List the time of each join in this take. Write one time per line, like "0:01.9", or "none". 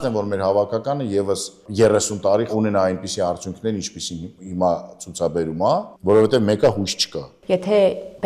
0:01.6
0:02.5
0:05.9
0:07.3